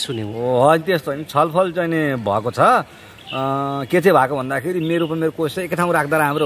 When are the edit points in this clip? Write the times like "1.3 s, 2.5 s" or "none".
none

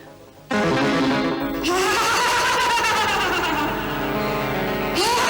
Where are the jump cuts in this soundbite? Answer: none

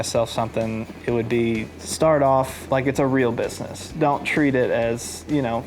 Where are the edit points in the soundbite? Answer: 0.9 s, 1.8 s, 2.6 s

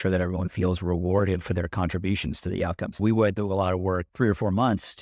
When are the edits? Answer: 3.0 s, 4.1 s

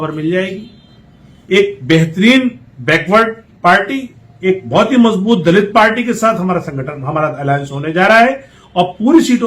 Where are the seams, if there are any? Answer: none

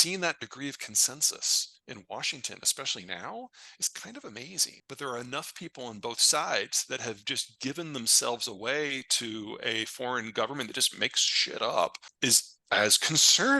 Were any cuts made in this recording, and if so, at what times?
4.7 s, 12.1 s

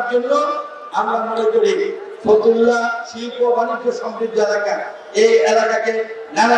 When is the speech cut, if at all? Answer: none

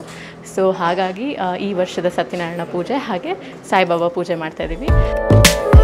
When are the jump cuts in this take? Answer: 4.9 s

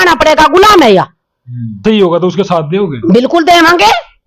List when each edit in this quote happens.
1.8 s

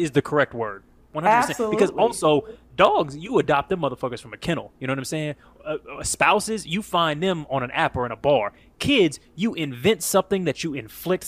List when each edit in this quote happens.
none

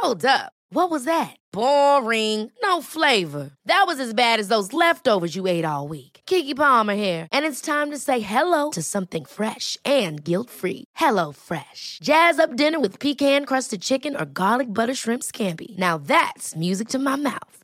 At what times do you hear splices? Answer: none

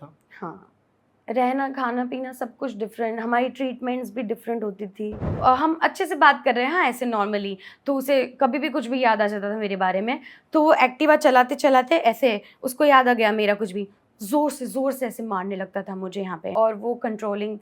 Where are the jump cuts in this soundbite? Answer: 5.4 s, 16.5 s

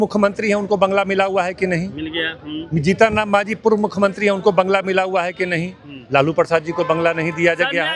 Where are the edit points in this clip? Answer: none

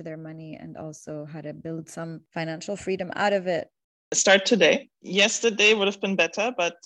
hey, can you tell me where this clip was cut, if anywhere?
4.1 s, 5.0 s

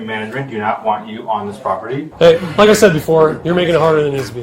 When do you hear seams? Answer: 2.1 s

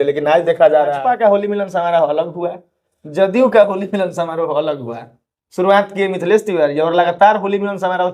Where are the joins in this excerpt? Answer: 1.0 s

